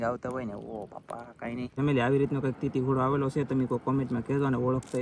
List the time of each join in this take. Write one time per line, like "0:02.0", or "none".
0:01.7